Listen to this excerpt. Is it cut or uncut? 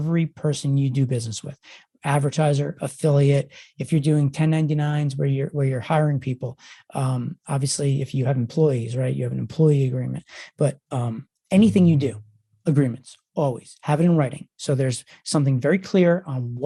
uncut